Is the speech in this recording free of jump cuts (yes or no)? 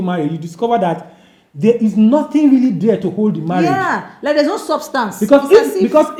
yes